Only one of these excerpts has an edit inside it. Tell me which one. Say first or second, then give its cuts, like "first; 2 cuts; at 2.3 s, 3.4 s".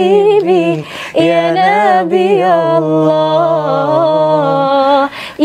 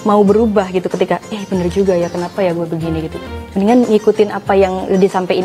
second; 1 cut; at 3.2 s